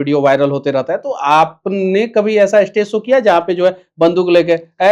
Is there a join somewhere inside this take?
no; 0 cuts

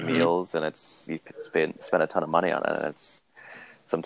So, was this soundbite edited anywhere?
no; 0 cuts

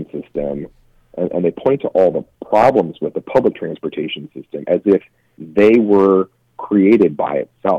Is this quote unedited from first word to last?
yes; 0 cuts

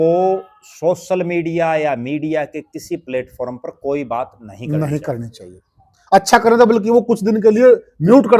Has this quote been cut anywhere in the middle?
no; 0 cuts

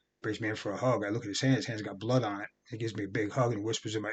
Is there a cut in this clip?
no; 0 cuts

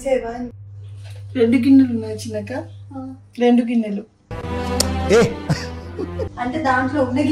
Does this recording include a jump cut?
no; 0 cuts

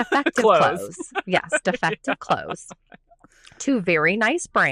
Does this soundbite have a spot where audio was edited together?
no; 0 cuts

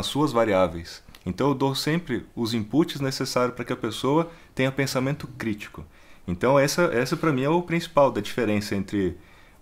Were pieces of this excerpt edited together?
no; 0 cuts

